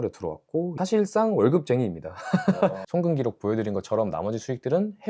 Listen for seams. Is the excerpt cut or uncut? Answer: cut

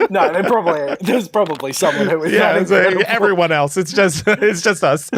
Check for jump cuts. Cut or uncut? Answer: uncut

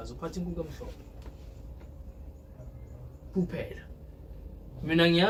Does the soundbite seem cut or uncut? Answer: uncut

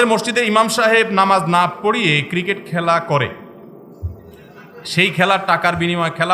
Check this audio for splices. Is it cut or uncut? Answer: uncut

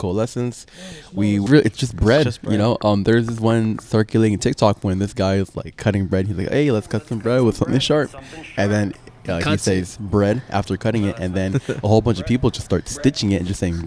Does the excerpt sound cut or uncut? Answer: cut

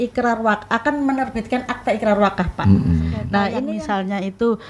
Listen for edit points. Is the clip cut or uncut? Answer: cut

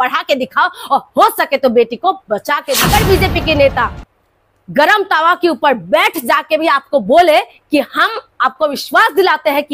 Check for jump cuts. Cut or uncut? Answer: cut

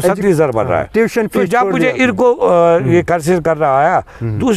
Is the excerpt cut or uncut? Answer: uncut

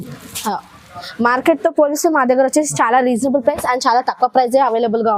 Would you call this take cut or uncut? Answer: cut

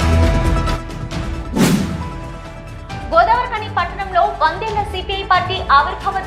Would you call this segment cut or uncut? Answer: cut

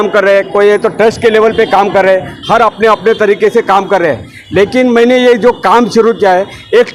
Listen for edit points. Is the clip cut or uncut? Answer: uncut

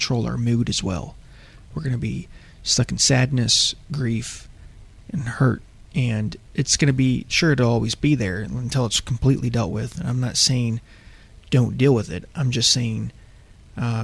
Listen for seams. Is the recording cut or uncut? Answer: uncut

